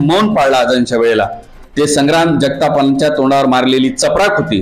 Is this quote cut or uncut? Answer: uncut